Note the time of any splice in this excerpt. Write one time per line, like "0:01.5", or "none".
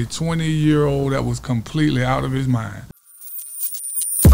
0:02.9